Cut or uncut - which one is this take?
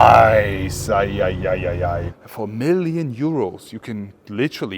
cut